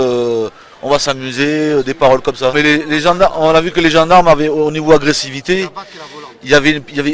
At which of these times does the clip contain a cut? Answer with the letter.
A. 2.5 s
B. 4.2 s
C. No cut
A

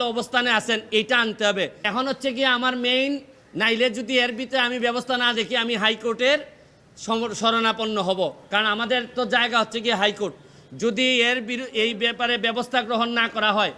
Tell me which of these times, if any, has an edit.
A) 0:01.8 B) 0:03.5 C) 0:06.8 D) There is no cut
A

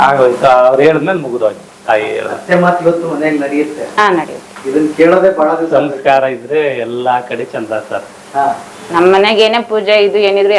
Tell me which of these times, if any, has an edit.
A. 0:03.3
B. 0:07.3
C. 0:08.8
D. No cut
D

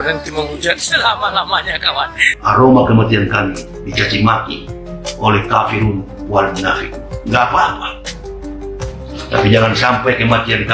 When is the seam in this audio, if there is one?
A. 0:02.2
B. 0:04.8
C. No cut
A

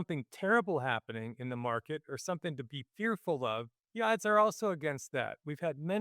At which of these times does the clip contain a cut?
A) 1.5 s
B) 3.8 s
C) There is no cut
B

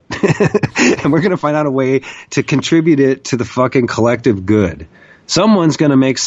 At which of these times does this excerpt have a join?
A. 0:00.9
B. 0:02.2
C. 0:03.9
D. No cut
D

